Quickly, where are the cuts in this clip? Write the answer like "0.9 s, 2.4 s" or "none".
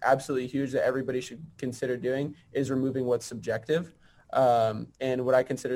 none